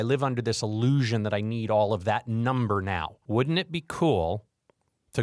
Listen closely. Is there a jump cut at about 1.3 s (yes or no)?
no